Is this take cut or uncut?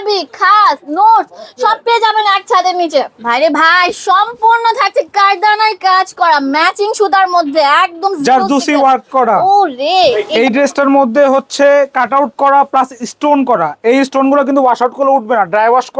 cut